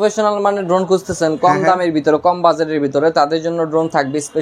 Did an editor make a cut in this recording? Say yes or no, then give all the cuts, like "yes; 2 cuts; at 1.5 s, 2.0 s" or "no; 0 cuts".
no; 0 cuts